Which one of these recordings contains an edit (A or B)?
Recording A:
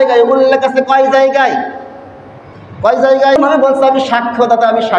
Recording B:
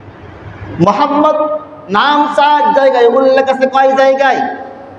A